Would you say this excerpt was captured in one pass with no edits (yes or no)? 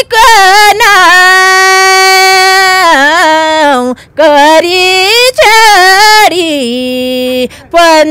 yes